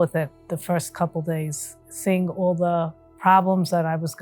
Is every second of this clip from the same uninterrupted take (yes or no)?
no